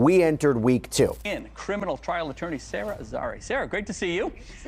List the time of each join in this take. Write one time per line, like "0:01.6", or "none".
0:01.2